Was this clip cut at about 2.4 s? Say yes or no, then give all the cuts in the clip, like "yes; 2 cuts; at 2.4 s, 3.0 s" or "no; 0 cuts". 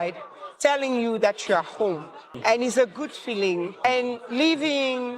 yes; 2 cuts; at 2.4 s, 3.8 s